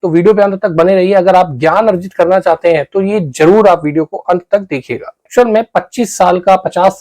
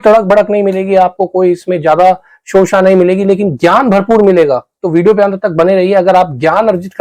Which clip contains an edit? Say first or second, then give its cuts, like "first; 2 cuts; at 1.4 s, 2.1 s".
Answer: first; 1 cut; at 5.3 s